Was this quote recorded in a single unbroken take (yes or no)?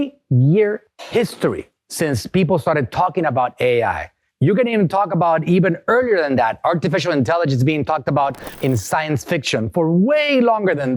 yes